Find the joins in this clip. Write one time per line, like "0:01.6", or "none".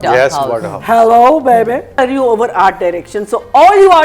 0:01.9